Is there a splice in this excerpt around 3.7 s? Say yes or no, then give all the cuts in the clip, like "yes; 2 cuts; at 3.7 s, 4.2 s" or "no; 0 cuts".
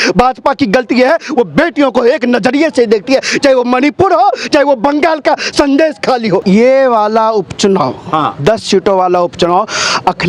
no; 1 cut; at 6.4 s